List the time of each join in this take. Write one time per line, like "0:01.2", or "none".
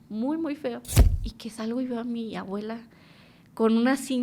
0:00.9